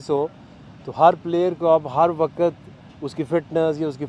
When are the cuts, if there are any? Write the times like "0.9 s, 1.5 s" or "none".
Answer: none